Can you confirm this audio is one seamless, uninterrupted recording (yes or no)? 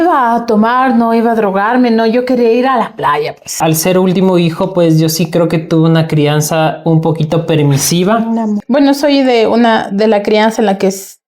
no